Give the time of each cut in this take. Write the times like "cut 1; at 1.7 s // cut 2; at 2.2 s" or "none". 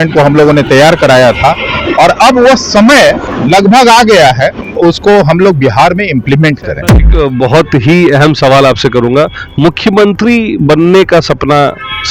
cut 1; at 3.3 s // cut 2; at 4.6 s // cut 3; at 7.0 s